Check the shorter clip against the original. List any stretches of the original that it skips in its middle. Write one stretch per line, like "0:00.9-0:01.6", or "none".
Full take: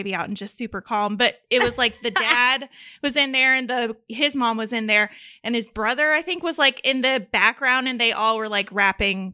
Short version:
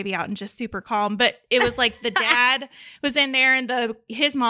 none